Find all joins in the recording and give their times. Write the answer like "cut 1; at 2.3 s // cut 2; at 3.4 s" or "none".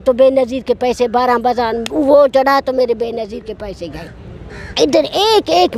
cut 1; at 4.6 s